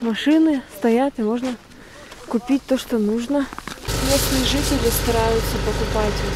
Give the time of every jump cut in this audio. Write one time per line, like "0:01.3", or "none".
0:03.9